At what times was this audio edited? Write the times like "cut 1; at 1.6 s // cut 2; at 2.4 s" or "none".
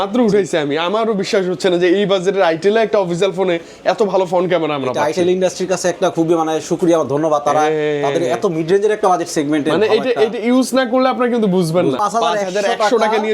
cut 1; at 12.0 s